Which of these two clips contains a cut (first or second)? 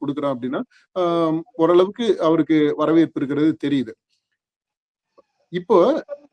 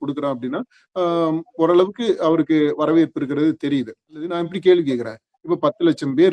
second